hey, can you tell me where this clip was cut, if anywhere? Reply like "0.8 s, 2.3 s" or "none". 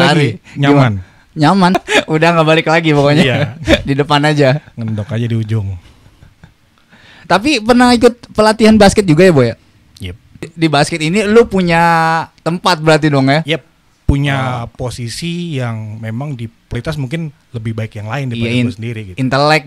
1.8 s, 10.5 s, 16.8 s